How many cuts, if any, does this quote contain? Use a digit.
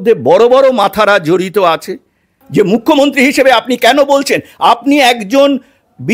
1